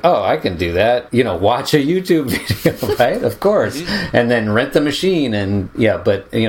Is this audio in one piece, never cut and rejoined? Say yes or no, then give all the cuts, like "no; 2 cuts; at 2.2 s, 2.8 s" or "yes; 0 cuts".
no; 1 cut; at 1.1 s